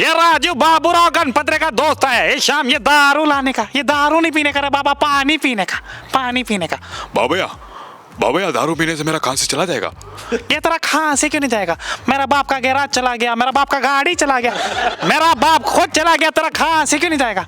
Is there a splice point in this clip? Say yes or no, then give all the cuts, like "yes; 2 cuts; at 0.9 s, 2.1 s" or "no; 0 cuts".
no; 0 cuts